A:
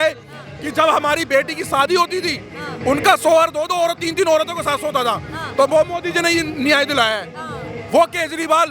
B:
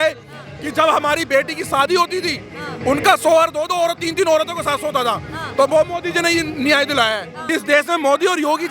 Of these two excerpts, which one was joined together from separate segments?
B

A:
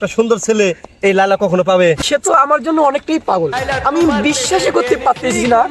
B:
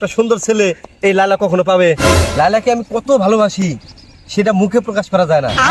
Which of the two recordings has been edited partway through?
A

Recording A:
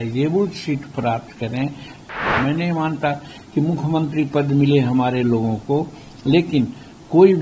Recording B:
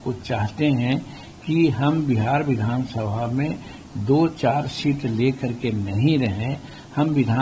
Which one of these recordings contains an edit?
A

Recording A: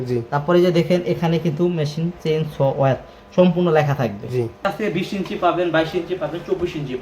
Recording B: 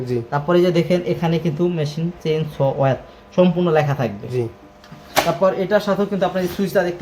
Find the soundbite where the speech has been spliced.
A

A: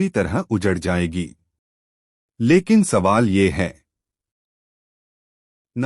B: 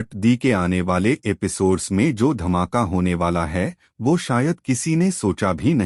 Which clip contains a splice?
A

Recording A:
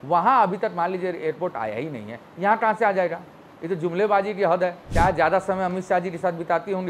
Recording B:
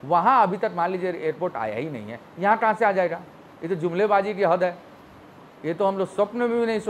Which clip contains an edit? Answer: A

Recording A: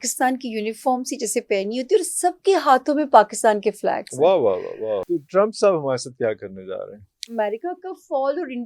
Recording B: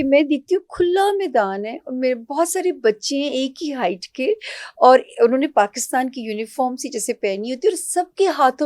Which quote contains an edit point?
A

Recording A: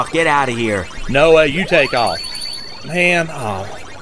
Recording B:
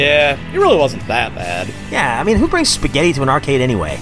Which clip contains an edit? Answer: A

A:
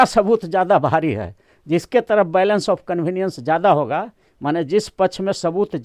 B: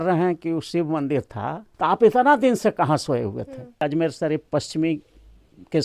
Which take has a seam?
B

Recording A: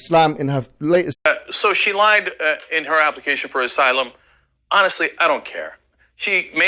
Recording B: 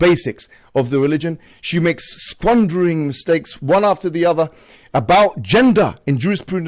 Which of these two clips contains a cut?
A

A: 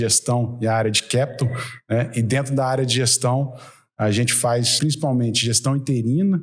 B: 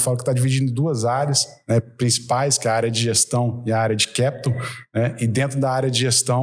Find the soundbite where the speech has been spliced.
A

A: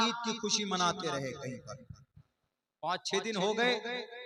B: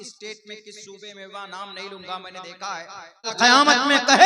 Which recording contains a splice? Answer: B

